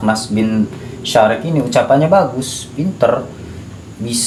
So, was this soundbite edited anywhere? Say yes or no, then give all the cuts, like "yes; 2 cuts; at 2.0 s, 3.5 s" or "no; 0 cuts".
no; 0 cuts